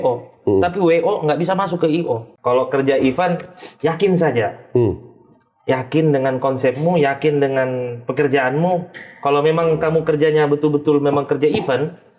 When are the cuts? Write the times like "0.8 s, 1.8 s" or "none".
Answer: 2.3 s